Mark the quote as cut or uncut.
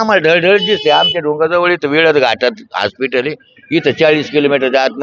uncut